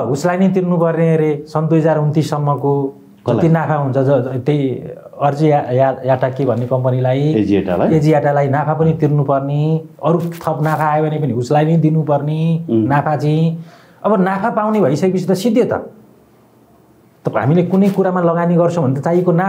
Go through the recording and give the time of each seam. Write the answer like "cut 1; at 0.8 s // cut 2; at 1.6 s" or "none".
none